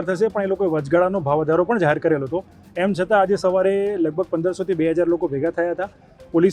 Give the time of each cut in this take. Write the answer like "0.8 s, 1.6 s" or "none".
none